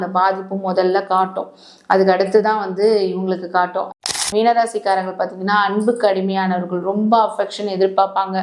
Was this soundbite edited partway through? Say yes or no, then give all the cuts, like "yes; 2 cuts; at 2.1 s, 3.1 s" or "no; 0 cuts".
yes; 1 cut; at 4.3 s